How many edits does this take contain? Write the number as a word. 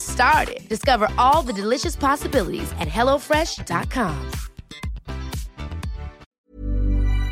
one